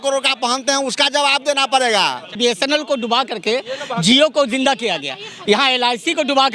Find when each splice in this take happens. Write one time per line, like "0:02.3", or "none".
0:02.4